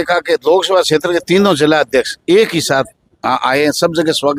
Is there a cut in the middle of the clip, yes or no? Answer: no